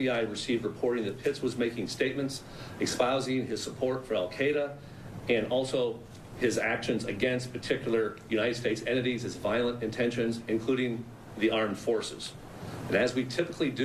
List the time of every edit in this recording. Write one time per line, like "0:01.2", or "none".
none